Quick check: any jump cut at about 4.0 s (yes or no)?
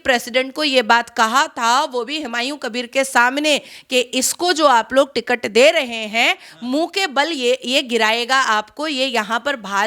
no